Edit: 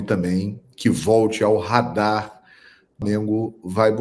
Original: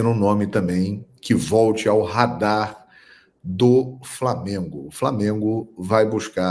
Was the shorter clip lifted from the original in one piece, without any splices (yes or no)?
no